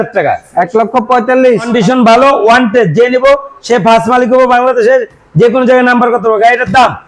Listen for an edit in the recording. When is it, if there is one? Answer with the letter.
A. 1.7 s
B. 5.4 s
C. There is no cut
A